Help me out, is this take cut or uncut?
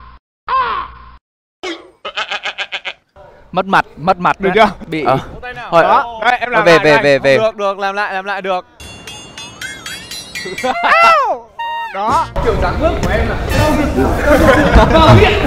uncut